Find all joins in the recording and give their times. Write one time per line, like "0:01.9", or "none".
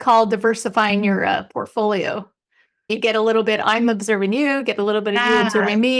0:02.9